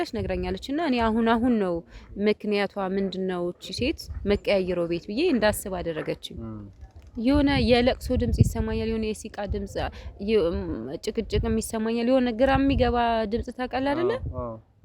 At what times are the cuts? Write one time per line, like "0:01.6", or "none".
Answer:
0:06.7